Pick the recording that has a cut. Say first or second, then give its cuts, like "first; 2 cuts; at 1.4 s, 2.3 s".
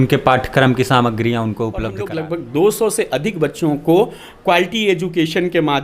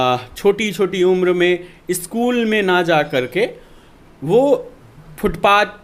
first; 1 cut; at 2.0 s